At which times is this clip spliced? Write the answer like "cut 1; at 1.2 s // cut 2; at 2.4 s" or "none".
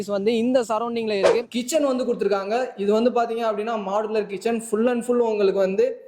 cut 1; at 1.6 s